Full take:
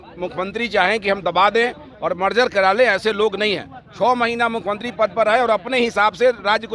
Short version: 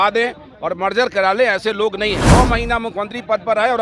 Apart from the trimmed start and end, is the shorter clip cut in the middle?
yes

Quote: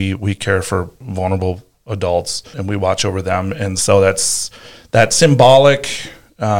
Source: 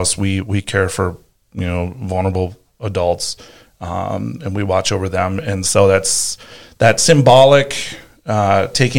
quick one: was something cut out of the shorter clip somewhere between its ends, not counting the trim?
yes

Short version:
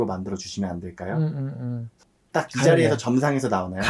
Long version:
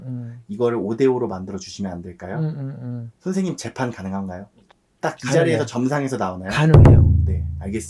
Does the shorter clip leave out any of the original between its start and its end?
yes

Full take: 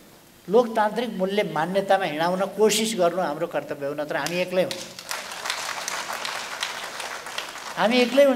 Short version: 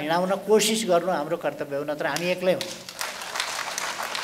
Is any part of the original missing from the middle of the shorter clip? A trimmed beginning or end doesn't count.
no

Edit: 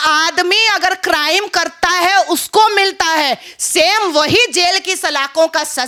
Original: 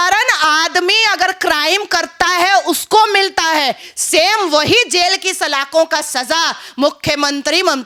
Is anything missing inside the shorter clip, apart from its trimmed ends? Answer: no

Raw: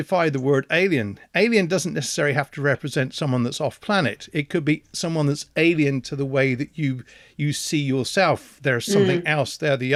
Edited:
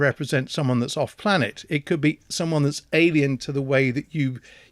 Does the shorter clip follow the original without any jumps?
yes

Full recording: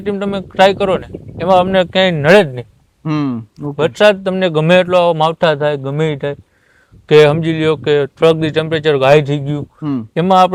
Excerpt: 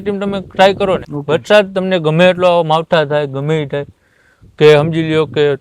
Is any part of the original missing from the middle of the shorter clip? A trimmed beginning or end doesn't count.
yes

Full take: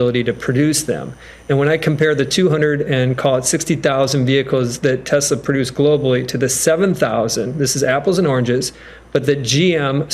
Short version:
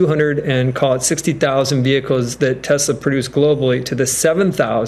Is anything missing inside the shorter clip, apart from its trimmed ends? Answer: no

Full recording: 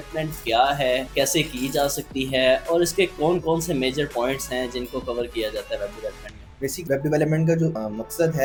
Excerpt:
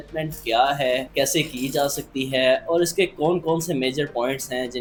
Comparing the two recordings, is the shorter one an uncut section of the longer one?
yes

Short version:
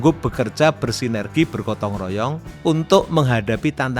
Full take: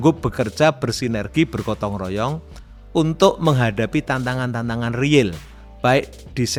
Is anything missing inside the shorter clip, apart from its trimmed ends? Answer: yes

